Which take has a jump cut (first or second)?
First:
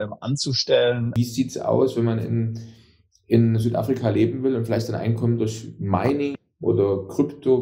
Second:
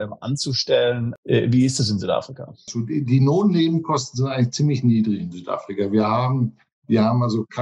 first